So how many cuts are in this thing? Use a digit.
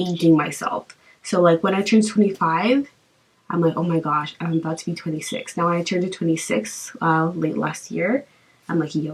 0